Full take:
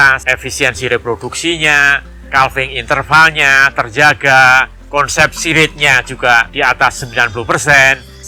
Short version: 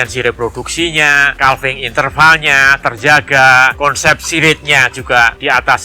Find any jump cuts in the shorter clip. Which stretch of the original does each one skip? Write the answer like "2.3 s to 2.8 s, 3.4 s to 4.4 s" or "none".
1.9 s to 2.2 s, 4.7 s to 4.9 s